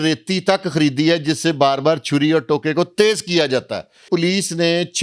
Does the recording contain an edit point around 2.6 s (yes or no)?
no